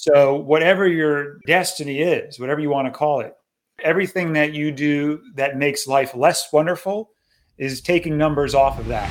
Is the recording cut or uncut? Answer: cut